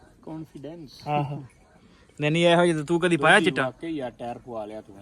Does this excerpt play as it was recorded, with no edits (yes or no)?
yes